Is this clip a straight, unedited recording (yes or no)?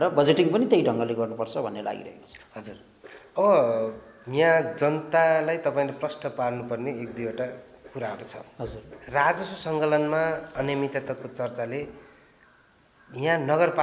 yes